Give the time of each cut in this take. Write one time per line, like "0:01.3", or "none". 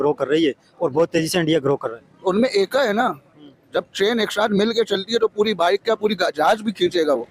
none